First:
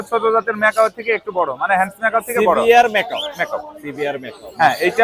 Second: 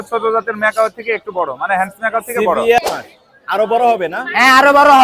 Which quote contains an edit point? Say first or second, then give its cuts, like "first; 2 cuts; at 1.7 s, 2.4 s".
second; 1 cut; at 2.8 s